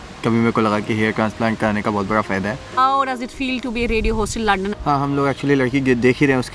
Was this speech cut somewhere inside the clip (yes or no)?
yes